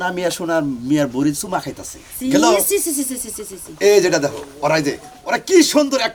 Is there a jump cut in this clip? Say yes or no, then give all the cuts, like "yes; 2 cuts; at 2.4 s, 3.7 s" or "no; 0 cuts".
no; 0 cuts